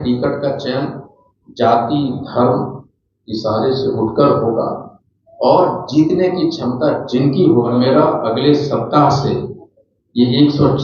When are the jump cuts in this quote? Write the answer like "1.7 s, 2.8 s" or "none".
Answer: 7.7 s